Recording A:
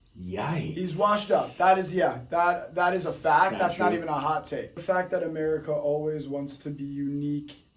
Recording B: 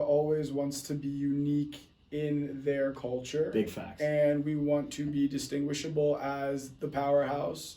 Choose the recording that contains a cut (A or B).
A